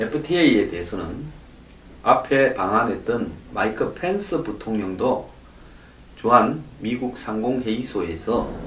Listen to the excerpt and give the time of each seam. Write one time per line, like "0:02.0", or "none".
none